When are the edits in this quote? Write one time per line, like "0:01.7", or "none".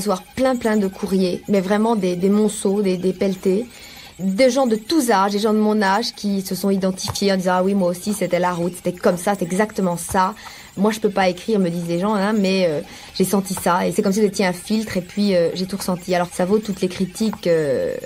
0:04.2
0:09.0
0:10.7
0:13.9
0:16.3